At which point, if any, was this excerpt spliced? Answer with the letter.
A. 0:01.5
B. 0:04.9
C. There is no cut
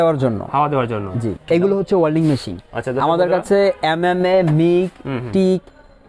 A